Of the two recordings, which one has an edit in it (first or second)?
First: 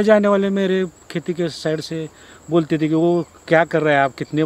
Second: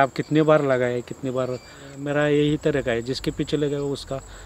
second